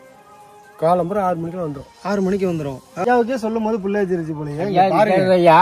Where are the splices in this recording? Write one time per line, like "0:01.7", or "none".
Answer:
0:03.0